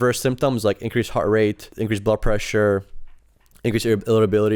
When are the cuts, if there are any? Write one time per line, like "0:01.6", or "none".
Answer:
0:01.7

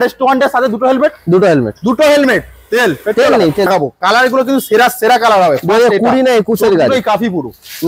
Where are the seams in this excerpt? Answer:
0:03.7

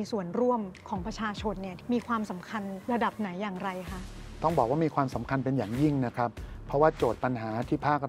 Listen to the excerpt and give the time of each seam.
0:01.7
0:02.8

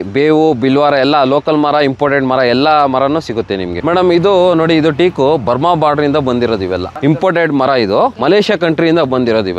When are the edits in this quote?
0:03.8
0:06.9

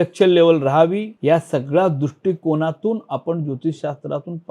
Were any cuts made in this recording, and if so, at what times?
0:01.1

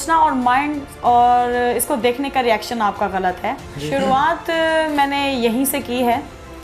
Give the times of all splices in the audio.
0:03.7

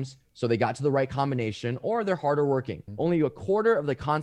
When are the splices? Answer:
0:02.8

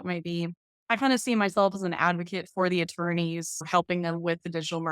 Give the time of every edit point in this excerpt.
0:03.6

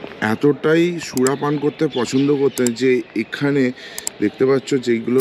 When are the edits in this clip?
none

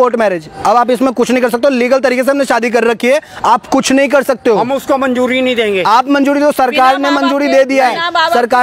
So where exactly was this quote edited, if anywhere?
none

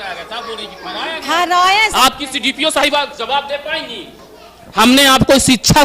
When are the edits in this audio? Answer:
0:01.9

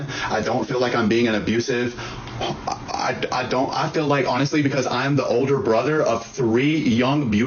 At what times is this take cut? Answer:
none

